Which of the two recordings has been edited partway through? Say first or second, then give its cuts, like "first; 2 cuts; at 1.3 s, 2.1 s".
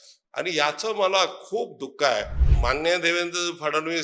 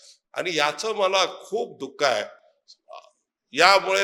first; 1 cut; at 2.4 s